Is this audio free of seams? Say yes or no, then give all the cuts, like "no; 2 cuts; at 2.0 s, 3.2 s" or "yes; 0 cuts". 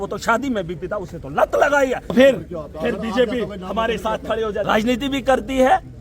no; 1 cut; at 2.1 s